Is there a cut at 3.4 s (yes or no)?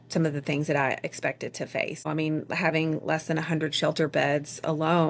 no